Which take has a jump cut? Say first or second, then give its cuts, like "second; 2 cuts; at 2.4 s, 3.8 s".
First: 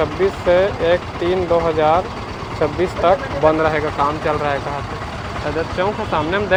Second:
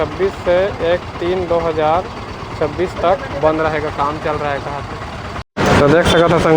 second; 1 cut; at 5.3 s